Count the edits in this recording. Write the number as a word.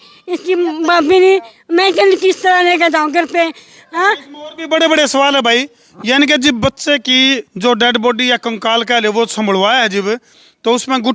zero